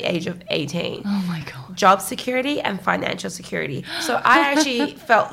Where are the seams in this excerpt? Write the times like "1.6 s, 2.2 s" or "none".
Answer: 1.6 s, 3.9 s

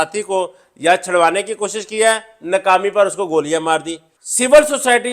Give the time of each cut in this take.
none

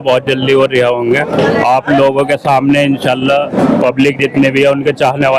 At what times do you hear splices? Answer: none

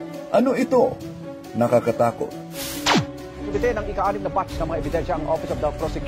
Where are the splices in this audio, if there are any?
none

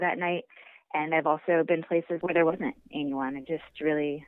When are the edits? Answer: 2.1 s

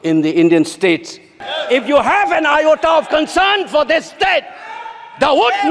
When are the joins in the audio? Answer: 1.5 s

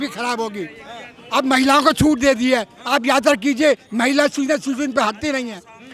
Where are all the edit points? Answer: none

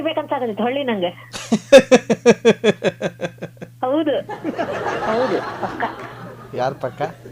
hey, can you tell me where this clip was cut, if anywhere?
none

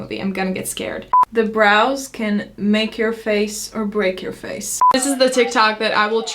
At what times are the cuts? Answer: 1.1 s, 4.9 s

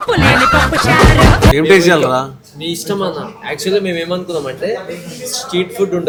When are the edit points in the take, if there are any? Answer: none

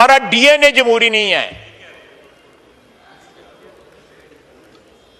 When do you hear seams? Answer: none

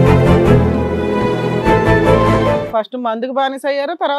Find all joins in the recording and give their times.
2.6 s

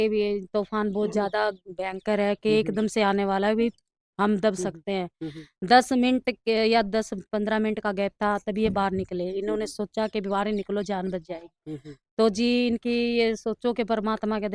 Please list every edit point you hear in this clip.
none

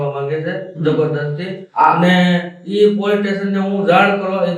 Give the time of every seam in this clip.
1.6 s

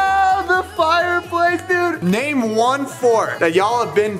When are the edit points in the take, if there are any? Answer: none

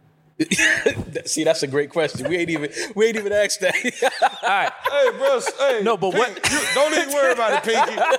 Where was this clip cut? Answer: none

